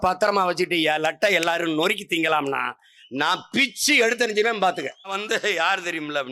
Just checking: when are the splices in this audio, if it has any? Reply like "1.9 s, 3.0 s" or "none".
5.2 s